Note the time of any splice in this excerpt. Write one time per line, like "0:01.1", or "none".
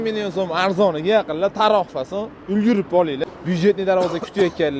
0:03.2